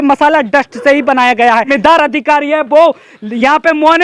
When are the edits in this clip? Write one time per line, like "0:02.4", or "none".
0:01.7